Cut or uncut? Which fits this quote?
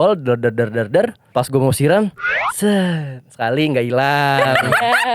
cut